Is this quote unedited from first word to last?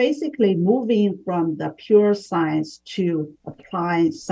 yes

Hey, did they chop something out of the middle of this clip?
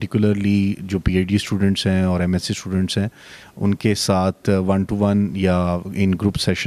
no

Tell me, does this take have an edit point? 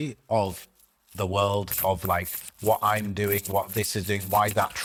no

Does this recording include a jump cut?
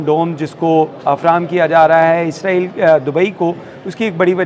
no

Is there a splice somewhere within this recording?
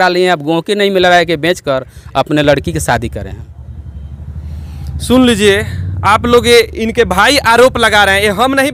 no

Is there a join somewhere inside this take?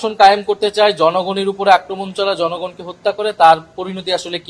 no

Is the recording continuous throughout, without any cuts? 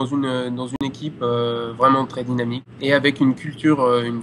no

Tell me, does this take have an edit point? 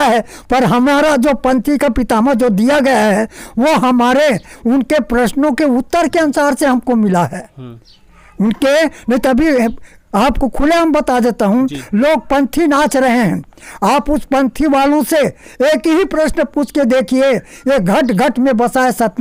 no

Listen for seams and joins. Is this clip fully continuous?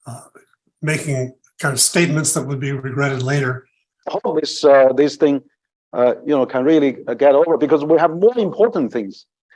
no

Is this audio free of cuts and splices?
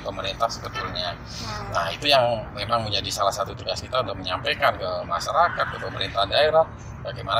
yes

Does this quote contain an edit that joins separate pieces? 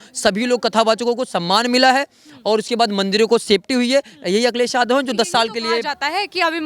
no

